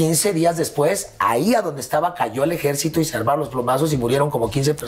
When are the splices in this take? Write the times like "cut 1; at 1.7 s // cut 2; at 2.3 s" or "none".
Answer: none